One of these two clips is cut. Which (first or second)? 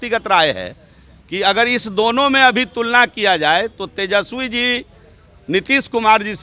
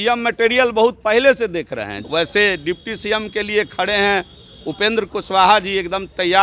second